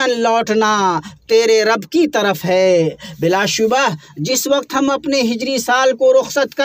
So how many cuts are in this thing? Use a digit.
0